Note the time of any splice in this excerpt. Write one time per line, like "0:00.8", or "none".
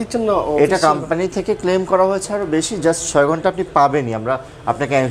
none